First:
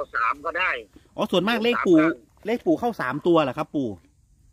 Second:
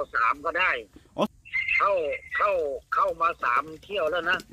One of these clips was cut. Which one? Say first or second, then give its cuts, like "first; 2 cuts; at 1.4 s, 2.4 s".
second; 1 cut; at 1.3 s